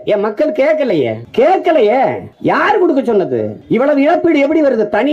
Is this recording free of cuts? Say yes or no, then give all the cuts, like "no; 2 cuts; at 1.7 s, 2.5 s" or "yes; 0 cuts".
no; 3 cuts; at 1.2 s, 2.3 s, 3.5 s